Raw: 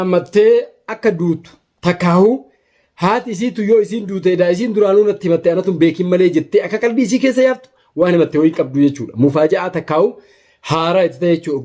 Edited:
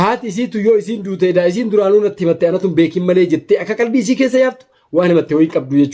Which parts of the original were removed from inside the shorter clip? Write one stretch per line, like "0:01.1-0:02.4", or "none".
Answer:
none

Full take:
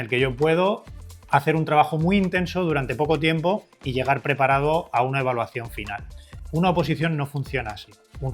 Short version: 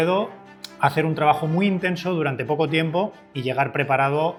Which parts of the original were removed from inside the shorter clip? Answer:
none

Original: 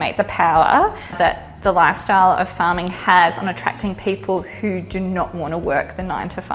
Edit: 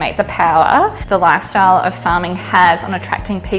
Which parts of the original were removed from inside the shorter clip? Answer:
0:01.0-0:01.5

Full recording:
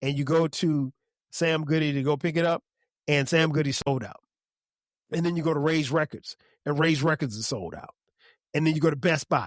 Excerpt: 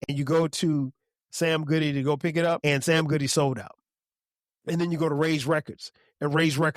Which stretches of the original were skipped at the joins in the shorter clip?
0:02.6-0:03.0

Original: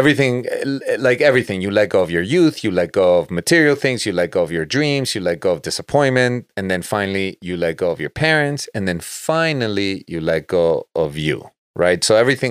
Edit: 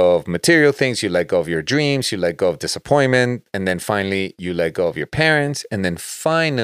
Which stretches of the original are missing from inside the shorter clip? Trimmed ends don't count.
none

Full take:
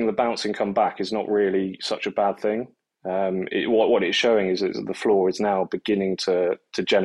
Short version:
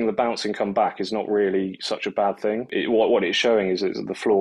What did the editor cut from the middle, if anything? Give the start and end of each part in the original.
0:02.7-0:03.5

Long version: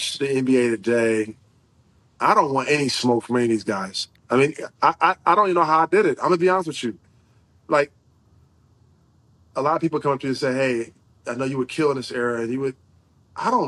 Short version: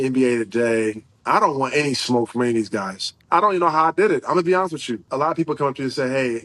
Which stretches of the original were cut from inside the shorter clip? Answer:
0:01.4-0:02.0
0:04.2-0:05.2
0:07.0-0:09.5

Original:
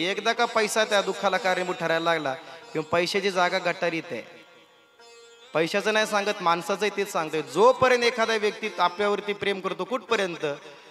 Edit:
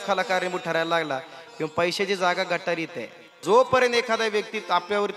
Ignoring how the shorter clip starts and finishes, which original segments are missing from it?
0:04.5-0:07.5

